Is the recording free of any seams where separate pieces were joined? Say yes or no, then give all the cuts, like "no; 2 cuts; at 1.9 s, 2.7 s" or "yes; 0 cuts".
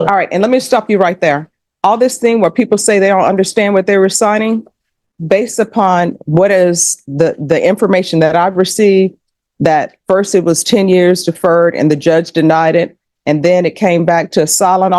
yes; 0 cuts